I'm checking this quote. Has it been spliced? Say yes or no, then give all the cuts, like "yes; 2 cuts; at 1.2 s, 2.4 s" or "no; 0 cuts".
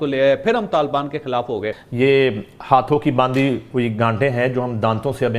yes; 1 cut; at 1.8 s